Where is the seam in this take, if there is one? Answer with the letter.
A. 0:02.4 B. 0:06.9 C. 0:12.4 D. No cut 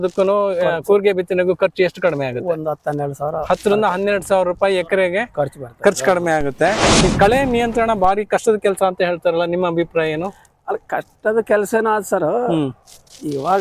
B